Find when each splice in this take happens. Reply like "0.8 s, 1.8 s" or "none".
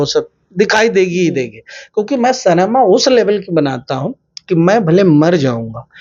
none